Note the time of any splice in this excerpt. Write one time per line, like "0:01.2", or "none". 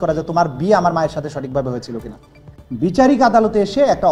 0:02.4